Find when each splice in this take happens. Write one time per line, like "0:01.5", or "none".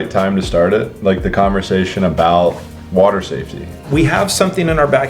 0:03.8